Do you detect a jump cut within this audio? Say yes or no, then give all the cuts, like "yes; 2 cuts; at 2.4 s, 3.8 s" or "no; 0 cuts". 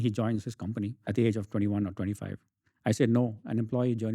yes; 1 cut; at 1.0 s